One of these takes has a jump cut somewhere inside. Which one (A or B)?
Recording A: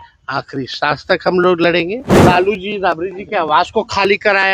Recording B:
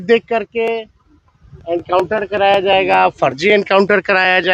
A